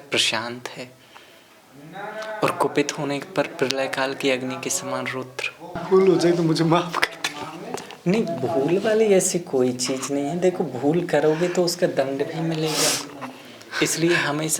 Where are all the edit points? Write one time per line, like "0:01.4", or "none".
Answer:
0:05.8